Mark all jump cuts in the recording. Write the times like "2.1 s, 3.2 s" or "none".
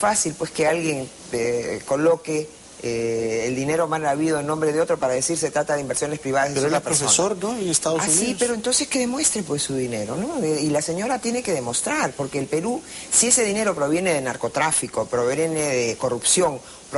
7.3 s